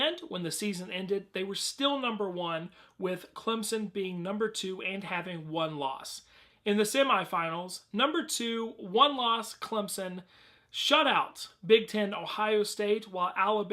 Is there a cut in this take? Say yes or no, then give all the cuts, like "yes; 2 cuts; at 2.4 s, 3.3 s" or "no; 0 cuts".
yes; 1 cut; at 6.6 s